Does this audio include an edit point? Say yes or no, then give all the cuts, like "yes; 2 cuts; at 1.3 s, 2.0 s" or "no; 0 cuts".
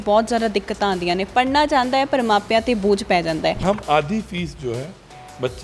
yes; 1 cut; at 3.6 s